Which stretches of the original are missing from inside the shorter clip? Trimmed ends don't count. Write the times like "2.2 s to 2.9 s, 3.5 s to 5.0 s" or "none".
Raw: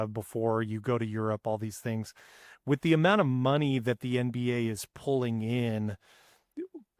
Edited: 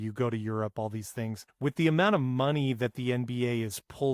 2.1 s to 2.5 s

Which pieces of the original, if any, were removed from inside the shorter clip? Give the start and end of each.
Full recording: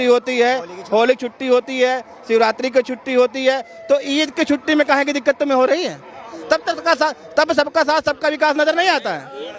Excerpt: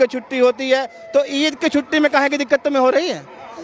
none

